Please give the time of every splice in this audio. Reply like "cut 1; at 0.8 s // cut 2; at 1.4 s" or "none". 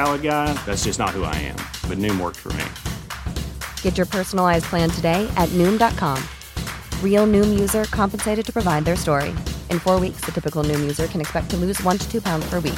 none